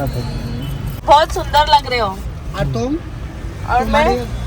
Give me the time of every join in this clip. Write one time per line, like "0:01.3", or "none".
0:01.0